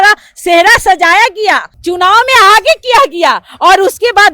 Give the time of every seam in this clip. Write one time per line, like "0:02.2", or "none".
0:01.7